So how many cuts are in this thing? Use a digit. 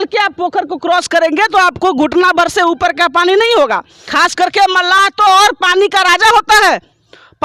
1